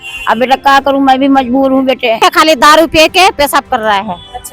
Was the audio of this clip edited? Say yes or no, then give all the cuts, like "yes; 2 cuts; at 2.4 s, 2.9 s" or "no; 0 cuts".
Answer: yes; 1 cut; at 2.2 s